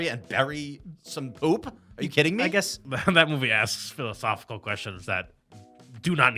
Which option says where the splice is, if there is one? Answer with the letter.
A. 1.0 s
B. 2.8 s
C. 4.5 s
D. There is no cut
B